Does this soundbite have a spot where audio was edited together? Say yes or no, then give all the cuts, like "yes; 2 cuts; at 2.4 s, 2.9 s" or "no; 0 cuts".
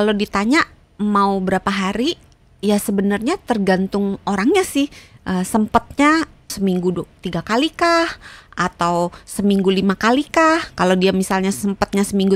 yes; 1 cut; at 6.4 s